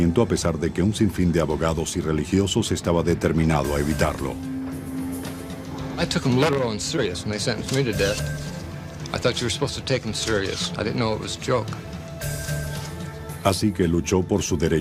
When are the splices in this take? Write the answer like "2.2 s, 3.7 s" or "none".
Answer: 10.7 s